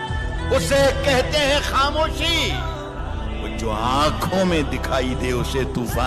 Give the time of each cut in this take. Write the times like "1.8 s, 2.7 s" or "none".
none